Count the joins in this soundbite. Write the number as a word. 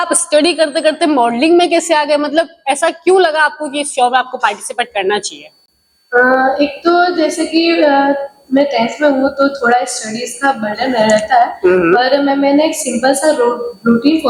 zero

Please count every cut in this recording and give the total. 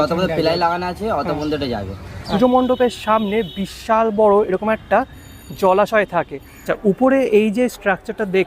two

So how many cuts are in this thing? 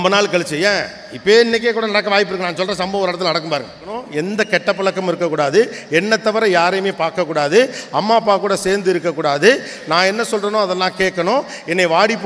one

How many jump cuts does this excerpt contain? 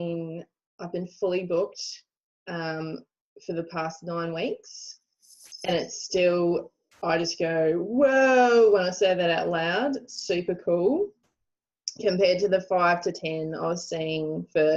zero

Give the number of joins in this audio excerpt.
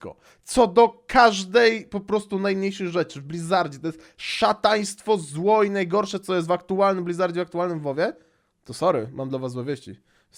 zero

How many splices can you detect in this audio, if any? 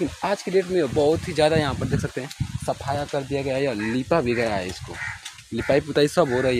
zero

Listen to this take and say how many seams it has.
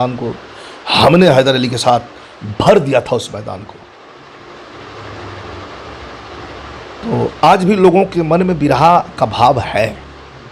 zero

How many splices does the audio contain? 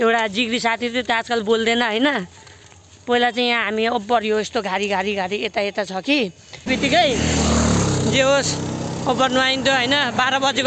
one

